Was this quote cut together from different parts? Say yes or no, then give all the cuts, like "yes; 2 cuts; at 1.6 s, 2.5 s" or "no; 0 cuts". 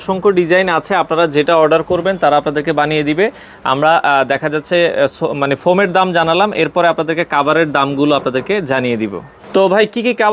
no; 0 cuts